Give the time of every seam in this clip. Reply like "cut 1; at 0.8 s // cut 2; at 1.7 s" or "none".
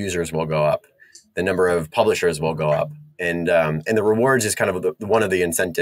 none